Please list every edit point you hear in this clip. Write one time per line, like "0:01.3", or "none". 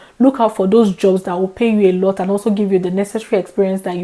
none